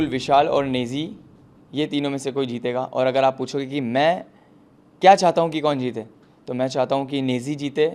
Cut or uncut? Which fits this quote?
uncut